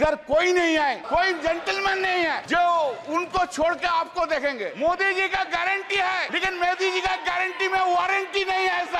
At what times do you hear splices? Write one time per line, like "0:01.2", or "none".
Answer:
0:01.0
0:02.4
0:04.7
0:06.3